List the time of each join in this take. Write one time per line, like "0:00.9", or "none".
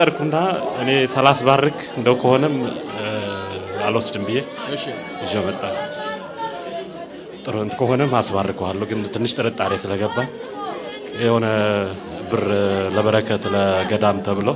none